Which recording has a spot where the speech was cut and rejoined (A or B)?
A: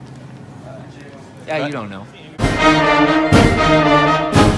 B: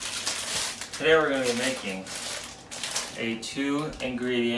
A